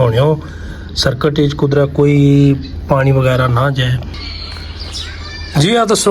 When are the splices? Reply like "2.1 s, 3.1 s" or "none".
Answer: 4.3 s